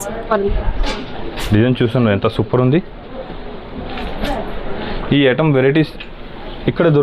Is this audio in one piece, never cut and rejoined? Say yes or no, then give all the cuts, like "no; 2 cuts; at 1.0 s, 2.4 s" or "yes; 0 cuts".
yes; 0 cuts